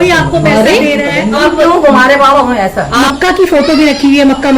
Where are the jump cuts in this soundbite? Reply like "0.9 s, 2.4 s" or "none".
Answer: 1.4 s, 3.0 s